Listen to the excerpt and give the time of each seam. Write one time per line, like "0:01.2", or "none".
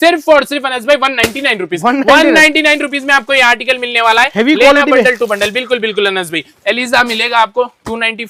none